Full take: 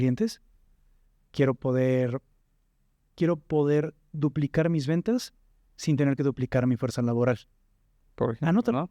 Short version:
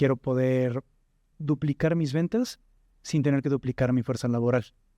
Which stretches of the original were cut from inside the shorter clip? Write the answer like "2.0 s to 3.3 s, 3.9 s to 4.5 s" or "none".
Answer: 2.7 s to 4.0 s

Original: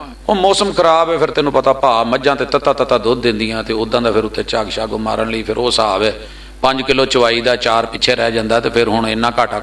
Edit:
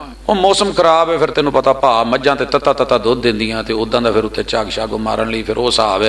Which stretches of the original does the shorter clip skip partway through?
none

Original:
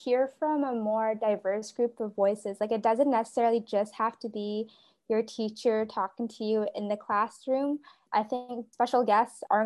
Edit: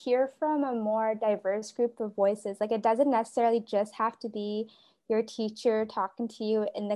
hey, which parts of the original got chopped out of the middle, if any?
none

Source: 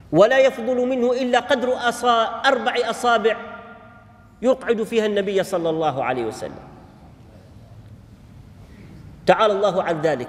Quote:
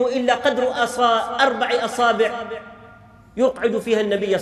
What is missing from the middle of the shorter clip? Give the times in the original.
none

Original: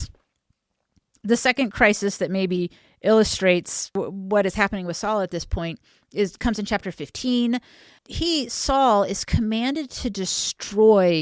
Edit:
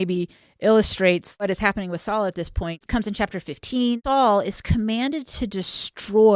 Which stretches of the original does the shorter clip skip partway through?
3.9 s to 4.4 s, 5.8 s to 6.3 s, 7.5 s to 8.6 s

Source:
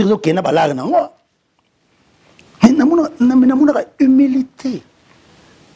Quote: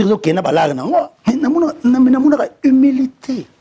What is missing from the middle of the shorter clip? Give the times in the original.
1.2 s to 2.5 s

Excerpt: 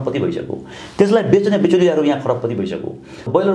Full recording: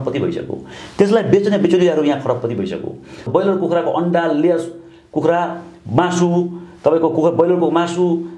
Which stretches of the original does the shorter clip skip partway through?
none

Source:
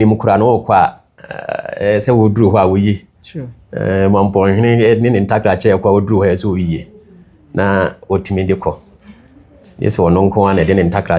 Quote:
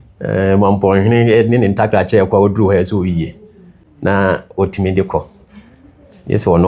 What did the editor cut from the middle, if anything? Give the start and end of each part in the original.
none

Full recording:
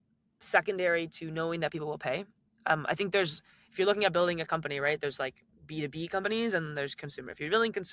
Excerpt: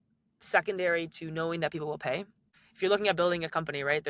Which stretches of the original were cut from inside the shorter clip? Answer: 2.5 s to 3.4 s

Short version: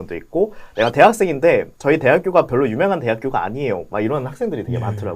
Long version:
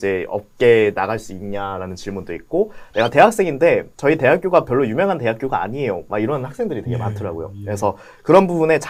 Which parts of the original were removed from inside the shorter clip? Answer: none

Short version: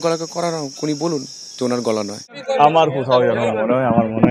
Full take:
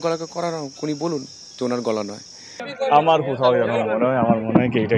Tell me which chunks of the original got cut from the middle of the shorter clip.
2.3 s to 2.6 s

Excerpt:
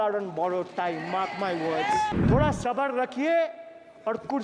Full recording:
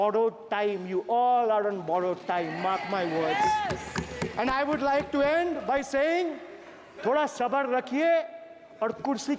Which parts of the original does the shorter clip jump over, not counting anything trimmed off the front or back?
3.7 s to 6.9 s

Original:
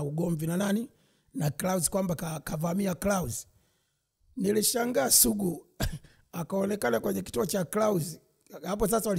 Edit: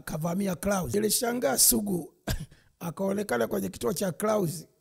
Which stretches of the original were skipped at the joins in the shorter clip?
3.3 s to 4.5 s

